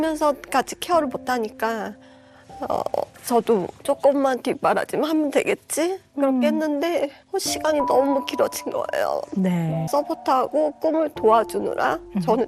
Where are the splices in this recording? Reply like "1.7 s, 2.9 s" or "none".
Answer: 9.8 s